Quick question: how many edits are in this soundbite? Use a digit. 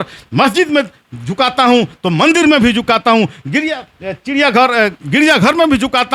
0